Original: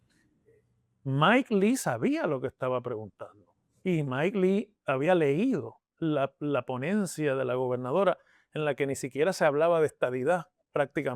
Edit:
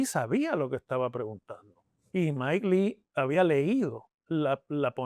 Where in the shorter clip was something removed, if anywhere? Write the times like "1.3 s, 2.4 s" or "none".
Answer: none